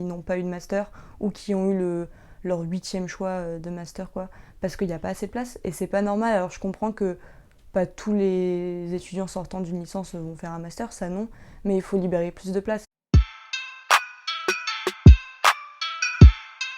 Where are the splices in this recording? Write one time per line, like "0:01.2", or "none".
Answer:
0:13.3